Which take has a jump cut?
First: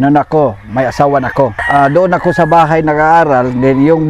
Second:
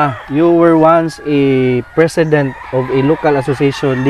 first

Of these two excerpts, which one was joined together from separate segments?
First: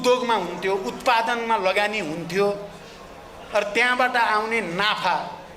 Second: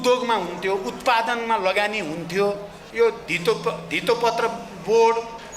second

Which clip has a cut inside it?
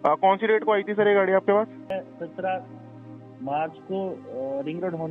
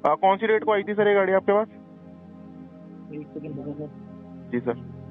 first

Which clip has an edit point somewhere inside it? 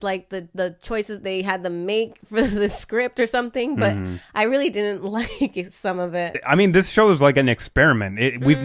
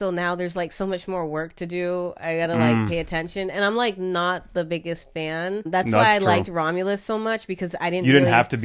first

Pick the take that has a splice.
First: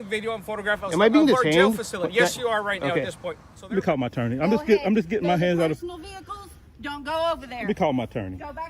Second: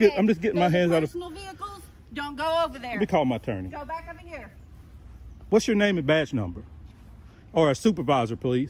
first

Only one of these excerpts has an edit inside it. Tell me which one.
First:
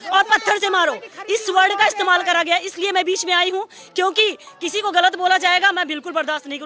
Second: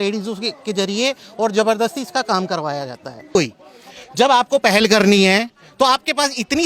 second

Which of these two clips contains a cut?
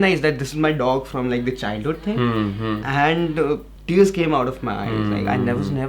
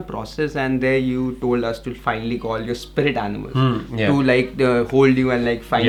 first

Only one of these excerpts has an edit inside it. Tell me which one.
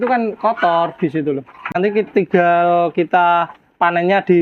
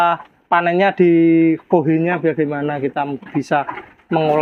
first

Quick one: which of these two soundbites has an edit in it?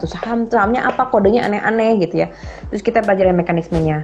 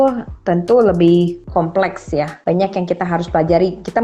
second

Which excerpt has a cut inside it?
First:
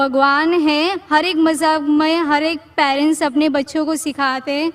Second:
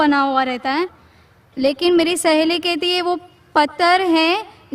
first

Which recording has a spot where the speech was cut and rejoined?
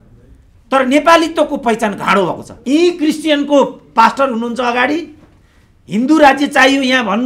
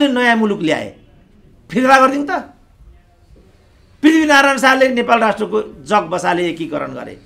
first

